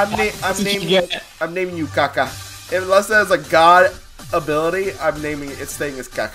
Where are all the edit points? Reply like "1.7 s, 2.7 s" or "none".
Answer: 2.6 s